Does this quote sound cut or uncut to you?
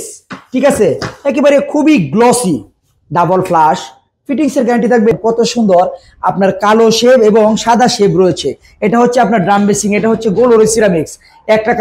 cut